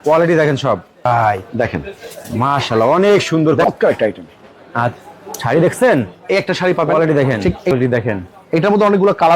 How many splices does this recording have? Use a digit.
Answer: 3